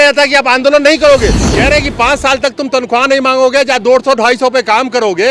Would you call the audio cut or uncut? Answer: cut